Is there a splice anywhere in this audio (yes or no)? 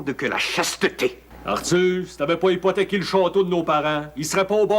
yes